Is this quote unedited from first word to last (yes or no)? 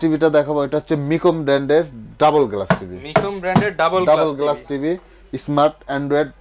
yes